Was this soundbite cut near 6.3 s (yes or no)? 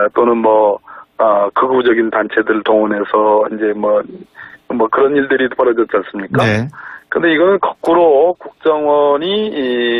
no